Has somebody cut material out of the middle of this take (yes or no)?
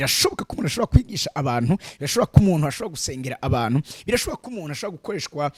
no